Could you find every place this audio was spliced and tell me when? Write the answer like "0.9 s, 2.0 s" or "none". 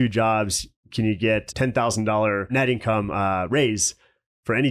1.5 s, 2.5 s